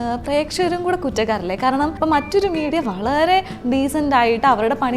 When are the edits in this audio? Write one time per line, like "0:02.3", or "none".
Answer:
0:01.9